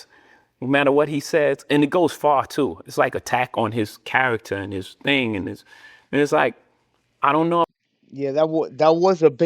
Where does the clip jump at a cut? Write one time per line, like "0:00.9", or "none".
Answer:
none